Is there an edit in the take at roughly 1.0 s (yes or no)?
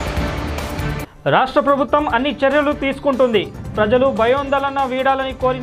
yes